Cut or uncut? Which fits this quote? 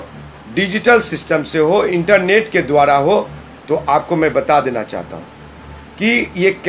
uncut